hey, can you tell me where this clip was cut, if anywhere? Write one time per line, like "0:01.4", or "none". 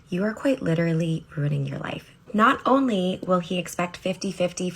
0:02.1